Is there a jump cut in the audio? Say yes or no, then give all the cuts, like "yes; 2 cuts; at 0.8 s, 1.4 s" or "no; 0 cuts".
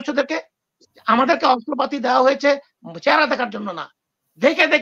no; 0 cuts